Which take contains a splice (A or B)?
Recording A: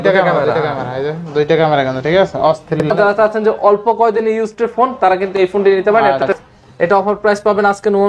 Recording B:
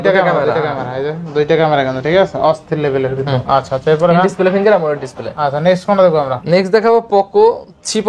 A